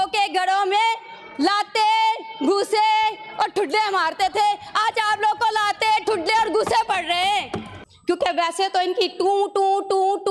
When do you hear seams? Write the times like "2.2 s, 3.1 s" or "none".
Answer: 7.8 s